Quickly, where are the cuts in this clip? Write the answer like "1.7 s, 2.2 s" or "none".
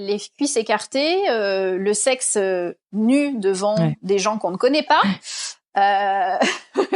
none